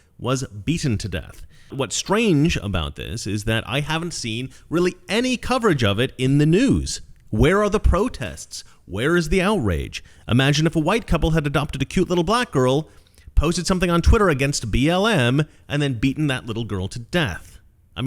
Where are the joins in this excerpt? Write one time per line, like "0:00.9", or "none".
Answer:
0:01.7